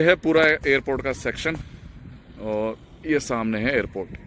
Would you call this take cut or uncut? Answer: uncut